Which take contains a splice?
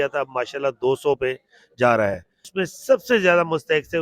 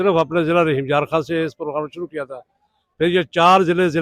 first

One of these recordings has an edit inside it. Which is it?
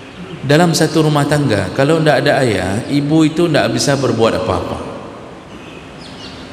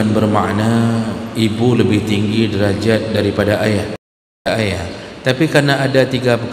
second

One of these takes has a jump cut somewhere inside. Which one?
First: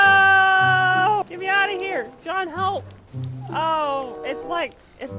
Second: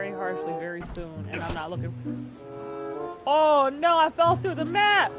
first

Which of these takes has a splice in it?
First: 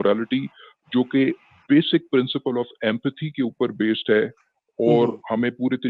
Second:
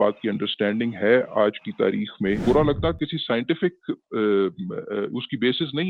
second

